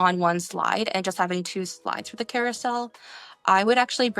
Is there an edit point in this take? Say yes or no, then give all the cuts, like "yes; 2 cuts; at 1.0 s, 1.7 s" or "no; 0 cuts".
no; 0 cuts